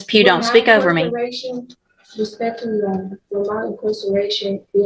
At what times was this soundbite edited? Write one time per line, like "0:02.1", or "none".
none

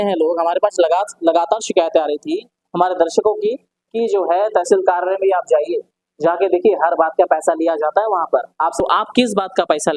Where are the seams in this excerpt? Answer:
0:08.8

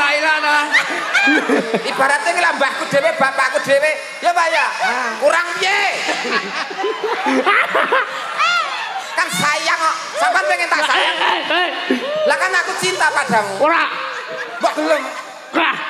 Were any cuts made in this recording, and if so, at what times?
0:01.6

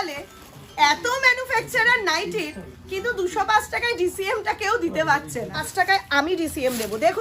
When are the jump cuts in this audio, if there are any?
0:05.7

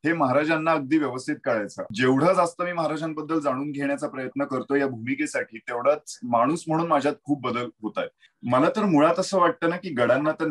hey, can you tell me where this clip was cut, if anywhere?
0:01.9
0:08.2

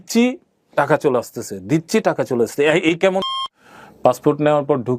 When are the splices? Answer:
0:03.3

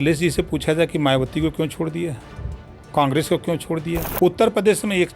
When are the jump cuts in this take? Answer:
0:04.1

